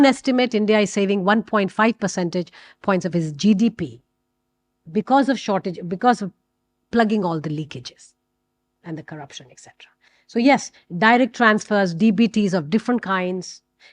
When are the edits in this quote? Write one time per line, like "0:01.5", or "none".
none